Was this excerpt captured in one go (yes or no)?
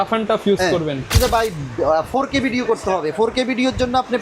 no